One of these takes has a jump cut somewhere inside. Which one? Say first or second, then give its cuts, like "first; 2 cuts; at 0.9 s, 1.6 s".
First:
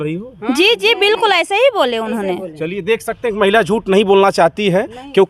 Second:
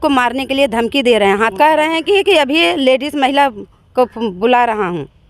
second; 1 cut; at 1.5 s